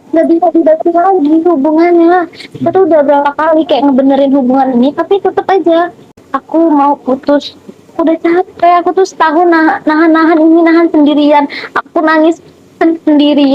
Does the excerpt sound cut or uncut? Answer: cut